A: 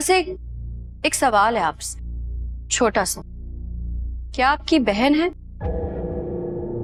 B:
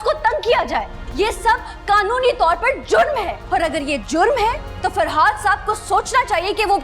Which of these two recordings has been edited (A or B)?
B